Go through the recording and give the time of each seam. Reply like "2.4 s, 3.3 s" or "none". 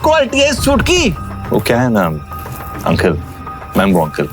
1.3 s